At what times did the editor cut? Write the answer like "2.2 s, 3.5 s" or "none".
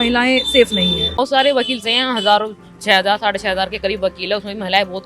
1.2 s